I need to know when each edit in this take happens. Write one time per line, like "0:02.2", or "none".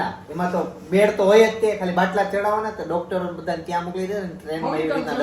none